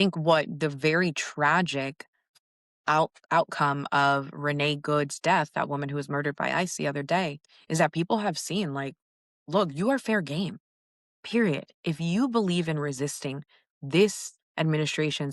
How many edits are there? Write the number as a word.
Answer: two